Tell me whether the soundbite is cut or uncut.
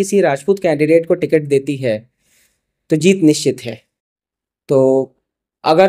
uncut